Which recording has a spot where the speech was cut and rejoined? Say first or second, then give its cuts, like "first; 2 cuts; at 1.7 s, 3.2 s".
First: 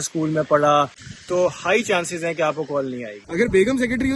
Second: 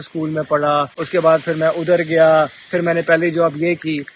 first; 2 cuts; at 1.0 s, 3.2 s